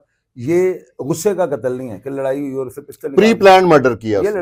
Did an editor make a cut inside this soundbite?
no; 0 cuts

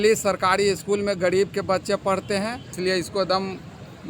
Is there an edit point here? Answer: yes; 1 cut; at 2.7 s

